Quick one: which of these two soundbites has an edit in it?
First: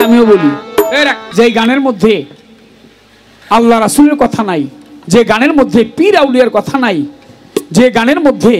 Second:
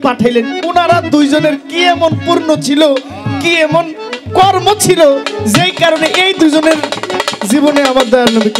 first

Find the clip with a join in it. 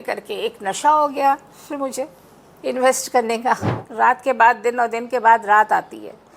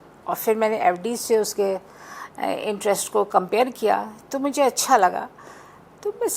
first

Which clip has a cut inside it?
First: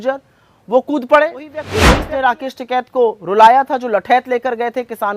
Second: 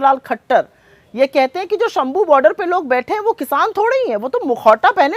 first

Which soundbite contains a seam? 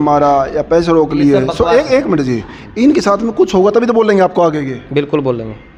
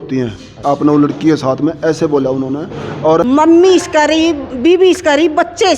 second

